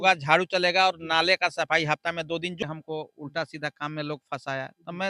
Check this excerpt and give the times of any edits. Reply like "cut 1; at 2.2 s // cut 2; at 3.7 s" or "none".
cut 1; at 2.6 s